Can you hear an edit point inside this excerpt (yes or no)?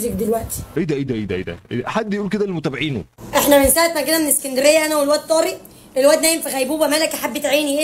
yes